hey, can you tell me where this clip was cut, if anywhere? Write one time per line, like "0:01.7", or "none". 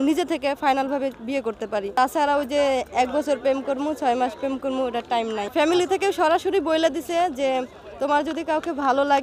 0:01.9
0:05.5